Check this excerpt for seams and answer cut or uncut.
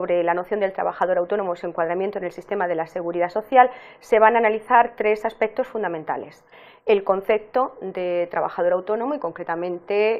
cut